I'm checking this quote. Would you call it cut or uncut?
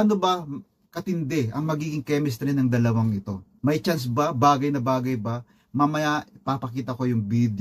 uncut